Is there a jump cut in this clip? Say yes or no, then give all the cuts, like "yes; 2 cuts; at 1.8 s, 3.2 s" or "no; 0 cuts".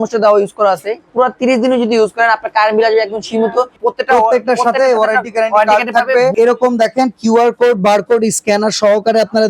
yes; 3 cuts; at 1.0 s, 3.7 s, 6.3 s